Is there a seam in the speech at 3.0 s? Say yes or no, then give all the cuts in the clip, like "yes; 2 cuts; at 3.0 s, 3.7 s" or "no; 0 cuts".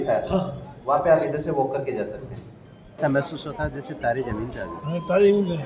yes; 1 cut; at 3.0 s